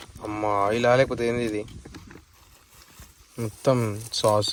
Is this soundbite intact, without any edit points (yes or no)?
yes